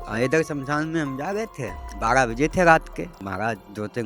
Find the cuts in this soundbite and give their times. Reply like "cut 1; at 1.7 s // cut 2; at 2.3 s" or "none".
cut 1; at 1.8 s // cut 2; at 3.2 s